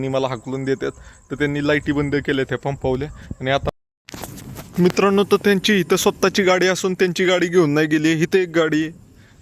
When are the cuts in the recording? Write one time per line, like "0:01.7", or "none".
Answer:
0:03.7

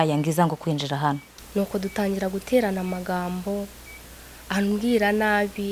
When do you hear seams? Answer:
0:01.3

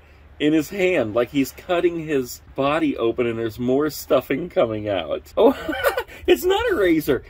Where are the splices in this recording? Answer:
0:05.2

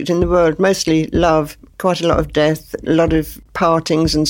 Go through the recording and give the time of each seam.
0:01.6
0:03.4

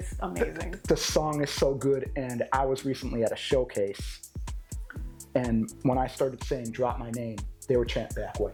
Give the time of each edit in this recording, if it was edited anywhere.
none

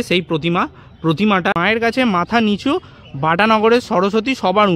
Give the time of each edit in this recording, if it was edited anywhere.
0:01.5

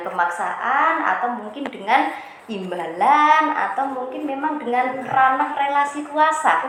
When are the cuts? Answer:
none

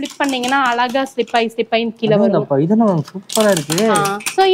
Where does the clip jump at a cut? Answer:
none

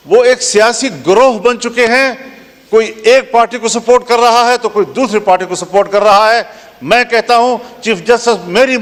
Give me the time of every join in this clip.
none

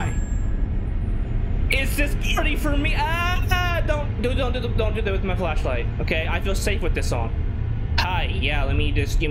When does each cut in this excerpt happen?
none

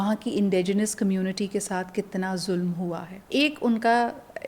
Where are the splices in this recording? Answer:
0:03.1

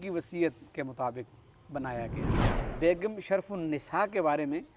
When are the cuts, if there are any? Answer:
0:02.6

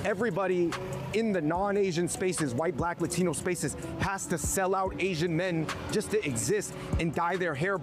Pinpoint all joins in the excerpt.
none

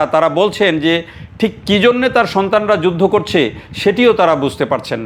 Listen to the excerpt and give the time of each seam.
none

